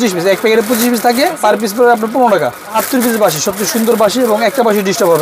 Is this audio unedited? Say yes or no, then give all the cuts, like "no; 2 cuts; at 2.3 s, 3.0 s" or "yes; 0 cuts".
no; 2 cuts; at 1.4 s, 2.8 s